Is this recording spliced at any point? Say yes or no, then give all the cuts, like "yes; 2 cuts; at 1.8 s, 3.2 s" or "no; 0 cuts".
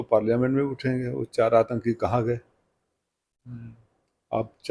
no; 0 cuts